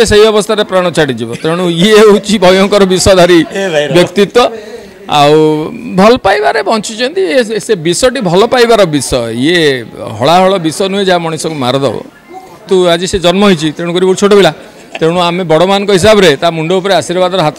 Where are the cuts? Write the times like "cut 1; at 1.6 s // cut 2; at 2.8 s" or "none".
cut 1; at 12.6 s